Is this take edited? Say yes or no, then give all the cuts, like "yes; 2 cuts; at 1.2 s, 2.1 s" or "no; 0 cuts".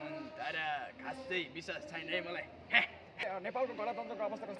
yes; 1 cut; at 3.3 s